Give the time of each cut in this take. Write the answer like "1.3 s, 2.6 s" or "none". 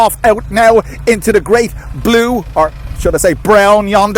none